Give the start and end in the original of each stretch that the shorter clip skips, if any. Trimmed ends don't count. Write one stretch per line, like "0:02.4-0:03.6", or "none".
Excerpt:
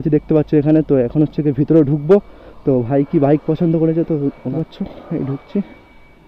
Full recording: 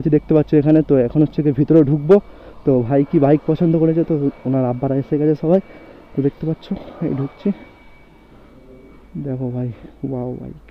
0:04.5-0:06.4